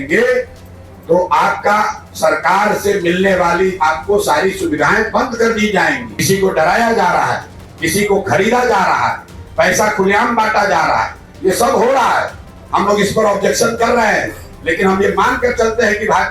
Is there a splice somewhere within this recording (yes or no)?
yes